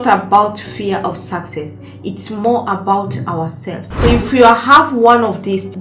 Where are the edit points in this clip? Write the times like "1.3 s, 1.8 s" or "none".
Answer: 3.8 s